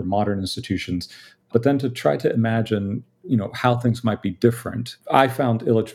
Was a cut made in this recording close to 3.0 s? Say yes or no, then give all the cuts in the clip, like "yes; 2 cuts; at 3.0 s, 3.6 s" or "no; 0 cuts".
no; 1 cut; at 1.5 s